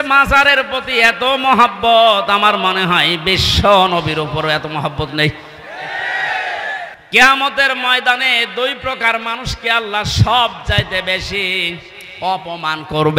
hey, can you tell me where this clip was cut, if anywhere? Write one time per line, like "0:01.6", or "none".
0:07.0